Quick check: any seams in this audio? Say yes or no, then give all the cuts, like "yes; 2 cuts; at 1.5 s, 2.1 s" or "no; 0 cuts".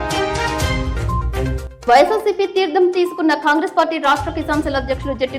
no; 0 cuts